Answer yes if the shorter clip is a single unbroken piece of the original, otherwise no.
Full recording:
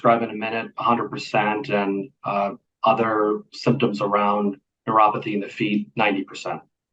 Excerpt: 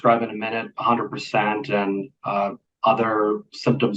yes